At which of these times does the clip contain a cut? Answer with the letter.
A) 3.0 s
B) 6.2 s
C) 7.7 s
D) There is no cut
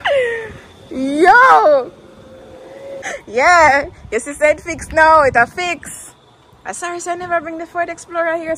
A